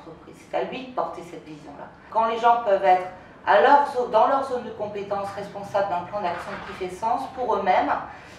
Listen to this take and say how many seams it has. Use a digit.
1